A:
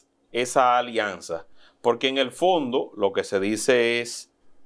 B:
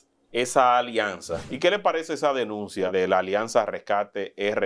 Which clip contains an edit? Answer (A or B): B